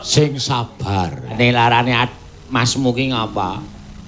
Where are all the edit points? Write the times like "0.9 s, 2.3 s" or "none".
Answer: 1.3 s